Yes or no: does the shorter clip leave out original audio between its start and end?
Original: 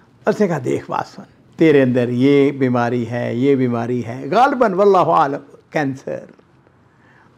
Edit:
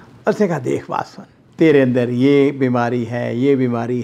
no